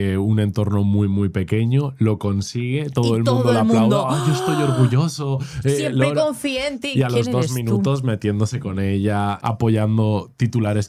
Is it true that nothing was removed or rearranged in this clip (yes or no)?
yes